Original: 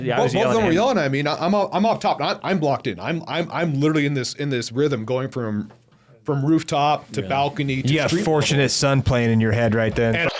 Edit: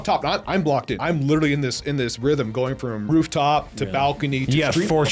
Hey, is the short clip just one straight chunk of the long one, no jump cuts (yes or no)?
no